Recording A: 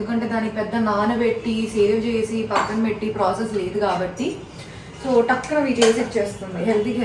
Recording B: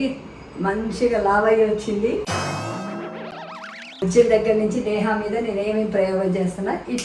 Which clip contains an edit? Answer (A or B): B